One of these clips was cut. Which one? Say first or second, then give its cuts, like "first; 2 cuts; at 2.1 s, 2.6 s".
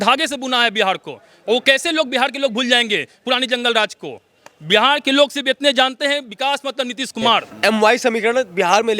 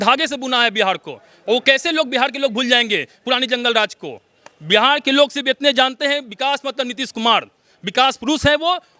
first; 1 cut; at 7.5 s